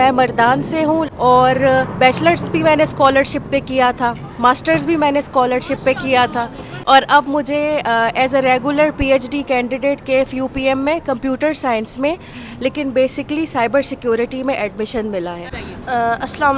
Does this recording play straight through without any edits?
no; 3 cuts; at 1.1 s, 6.7 s, 15.6 s

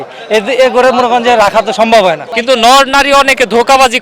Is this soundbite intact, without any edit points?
no; 1 cut; at 2.3 s

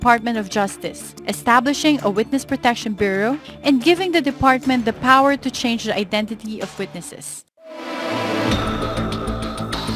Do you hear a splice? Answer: yes; 1 cut; at 6.7 s

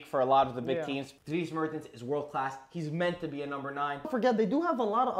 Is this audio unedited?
no; 2 cuts; at 1.1 s, 4.1 s

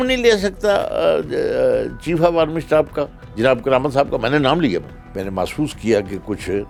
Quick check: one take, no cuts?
yes; 0 cuts

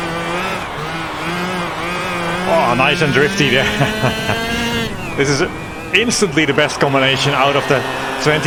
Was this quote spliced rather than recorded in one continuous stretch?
no; 0 cuts

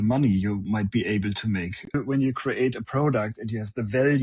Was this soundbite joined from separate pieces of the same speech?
yes; 1 cut; at 1.9 s

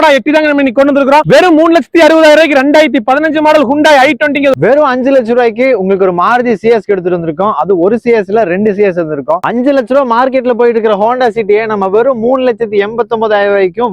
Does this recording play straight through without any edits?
no; 3 cuts; at 1.2 s, 4.5 s, 9.4 s

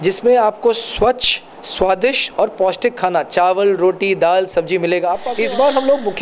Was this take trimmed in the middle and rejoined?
yes; 1 cut; at 5.3 s

